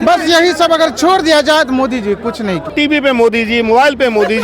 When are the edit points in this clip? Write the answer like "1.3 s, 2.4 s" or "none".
2.6 s

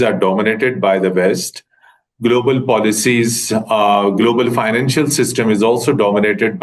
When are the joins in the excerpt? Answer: none

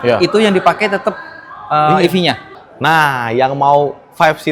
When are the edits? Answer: 2.5 s

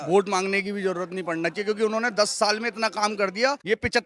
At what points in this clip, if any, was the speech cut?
none

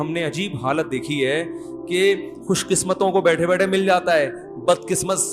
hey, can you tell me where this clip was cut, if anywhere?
none

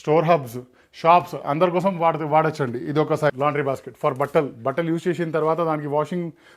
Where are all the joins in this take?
3.3 s

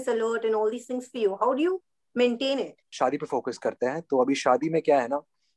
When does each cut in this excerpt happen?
2.9 s

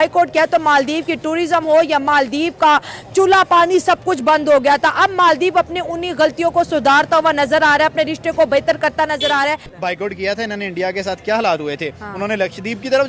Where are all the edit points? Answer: 9.7 s

